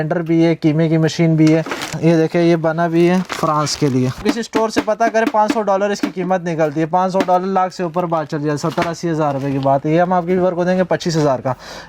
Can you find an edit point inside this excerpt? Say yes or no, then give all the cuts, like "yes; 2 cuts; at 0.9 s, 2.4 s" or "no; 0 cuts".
no; 0 cuts